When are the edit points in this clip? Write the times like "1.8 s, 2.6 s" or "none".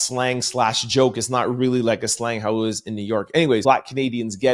3.6 s